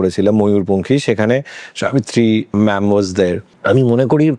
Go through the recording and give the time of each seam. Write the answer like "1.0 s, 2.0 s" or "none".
2.5 s, 3.5 s